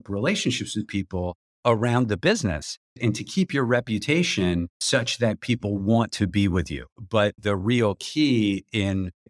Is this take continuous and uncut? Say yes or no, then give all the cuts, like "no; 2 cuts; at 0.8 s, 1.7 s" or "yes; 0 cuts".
no; 1 cut; at 6.9 s